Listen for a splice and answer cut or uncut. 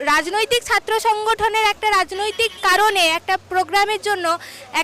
uncut